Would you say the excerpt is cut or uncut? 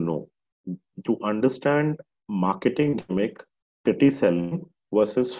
uncut